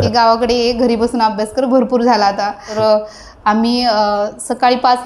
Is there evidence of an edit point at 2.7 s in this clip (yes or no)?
yes